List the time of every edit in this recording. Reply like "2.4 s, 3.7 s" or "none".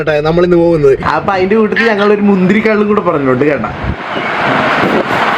1.0 s